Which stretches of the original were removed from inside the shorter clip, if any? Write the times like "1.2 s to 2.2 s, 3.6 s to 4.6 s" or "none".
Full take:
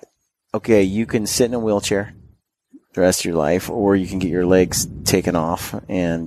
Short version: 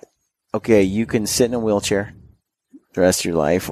none